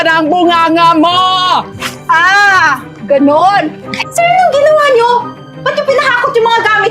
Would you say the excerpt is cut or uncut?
cut